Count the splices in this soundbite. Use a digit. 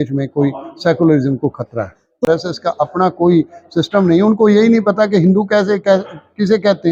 1